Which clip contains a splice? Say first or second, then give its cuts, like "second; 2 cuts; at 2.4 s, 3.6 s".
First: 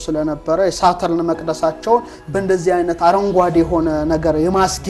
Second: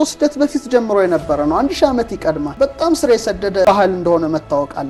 second; 2 cuts; at 2.5 s, 3.6 s